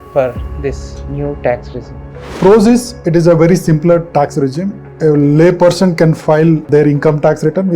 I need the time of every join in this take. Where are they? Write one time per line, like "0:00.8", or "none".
0:02.3
0:04.9
0:06.7